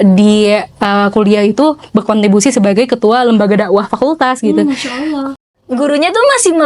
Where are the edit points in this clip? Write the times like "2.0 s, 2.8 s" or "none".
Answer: 5.3 s